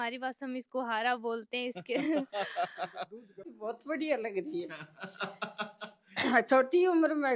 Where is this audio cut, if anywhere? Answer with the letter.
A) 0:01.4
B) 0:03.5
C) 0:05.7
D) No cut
B